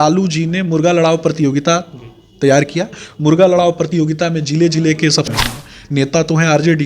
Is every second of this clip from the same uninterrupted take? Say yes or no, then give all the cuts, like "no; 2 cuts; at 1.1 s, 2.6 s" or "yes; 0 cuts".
no; 1 cut; at 5.3 s